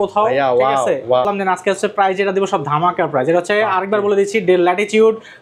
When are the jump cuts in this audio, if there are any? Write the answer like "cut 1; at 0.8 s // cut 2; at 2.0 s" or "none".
cut 1; at 1.3 s